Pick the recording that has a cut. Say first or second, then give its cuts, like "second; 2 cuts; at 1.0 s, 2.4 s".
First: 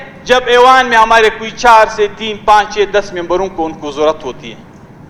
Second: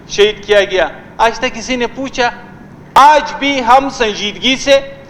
second; 1 cut; at 3.0 s